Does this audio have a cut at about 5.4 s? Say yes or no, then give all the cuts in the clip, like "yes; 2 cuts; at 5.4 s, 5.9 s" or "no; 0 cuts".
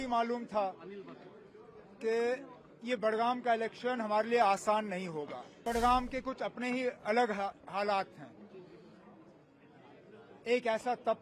yes; 1 cut; at 5.4 s